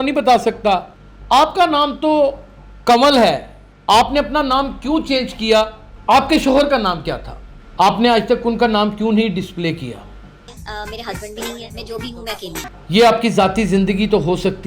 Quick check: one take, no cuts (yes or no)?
no